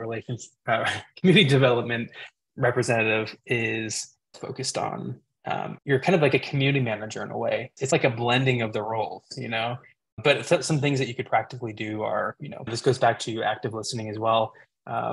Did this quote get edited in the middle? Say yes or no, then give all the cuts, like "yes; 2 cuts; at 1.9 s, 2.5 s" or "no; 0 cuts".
yes; 3 cuts; at 7.9 s, 10.1 s, 12.5 s